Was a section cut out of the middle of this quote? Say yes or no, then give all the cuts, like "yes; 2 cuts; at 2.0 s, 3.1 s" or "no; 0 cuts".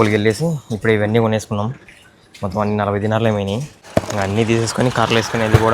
yes; 1 cut; at 3.8 s